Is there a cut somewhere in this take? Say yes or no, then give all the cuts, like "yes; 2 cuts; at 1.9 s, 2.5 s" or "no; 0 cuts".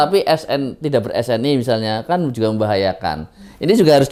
no; 0 cuts